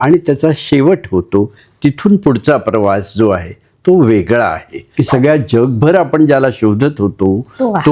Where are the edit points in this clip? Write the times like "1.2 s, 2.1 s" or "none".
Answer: 4.8 s